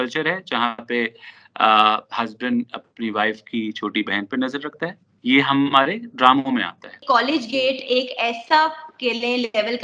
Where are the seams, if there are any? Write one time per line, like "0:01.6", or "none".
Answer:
0:05.0
0:07.0